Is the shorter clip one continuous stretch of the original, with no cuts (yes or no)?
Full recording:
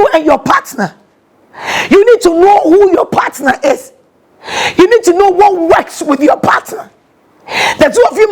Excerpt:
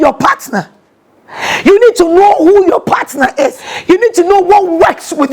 no